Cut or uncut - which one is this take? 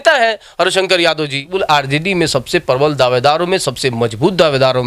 cut